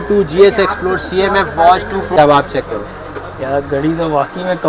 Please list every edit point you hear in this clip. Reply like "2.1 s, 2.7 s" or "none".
2.2 s